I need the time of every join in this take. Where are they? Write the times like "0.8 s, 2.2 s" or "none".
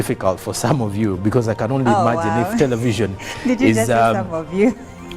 2.8 s